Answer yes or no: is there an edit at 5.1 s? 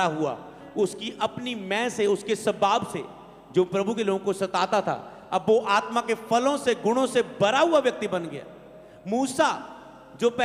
no